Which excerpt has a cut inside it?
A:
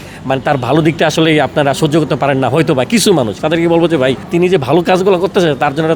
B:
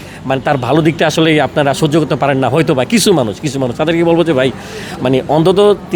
A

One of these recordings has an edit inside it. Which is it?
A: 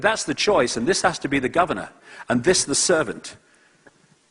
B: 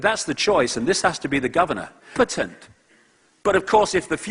A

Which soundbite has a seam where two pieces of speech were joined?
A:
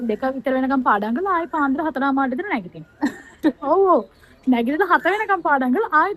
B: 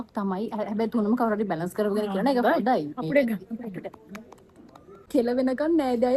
B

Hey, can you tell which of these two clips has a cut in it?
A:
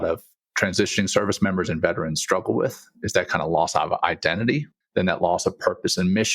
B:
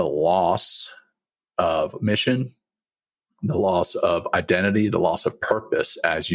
A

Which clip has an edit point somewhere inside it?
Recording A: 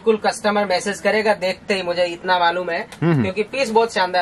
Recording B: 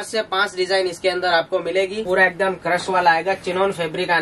B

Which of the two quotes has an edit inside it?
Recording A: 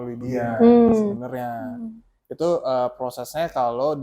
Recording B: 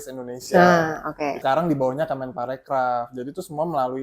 B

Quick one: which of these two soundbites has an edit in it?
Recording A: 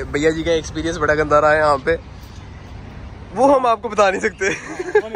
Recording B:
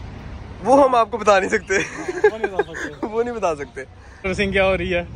B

